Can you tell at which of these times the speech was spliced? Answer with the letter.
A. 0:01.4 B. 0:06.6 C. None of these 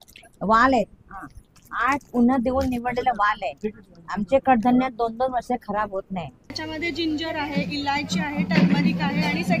B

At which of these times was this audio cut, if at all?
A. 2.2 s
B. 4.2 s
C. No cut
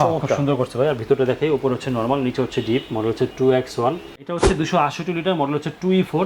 B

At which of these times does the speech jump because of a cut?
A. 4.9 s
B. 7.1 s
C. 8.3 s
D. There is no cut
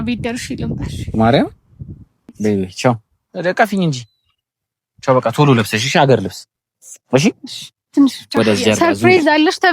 C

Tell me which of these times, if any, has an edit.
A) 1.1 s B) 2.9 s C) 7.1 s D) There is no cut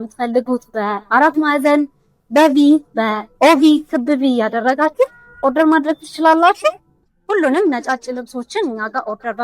C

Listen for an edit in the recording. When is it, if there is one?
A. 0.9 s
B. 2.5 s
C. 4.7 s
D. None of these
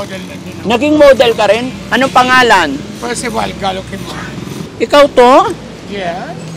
C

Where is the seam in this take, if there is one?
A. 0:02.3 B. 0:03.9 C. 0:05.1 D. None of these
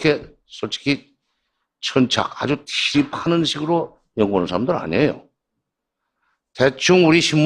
C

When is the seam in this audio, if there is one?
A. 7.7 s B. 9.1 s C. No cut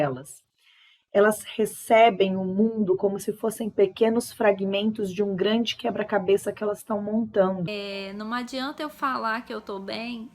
A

